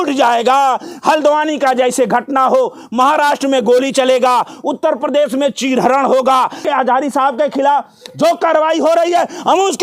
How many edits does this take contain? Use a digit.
1